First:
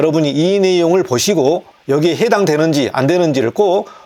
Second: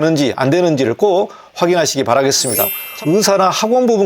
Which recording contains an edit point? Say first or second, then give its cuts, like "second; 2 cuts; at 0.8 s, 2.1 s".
second; 1 cut; at 2.8 s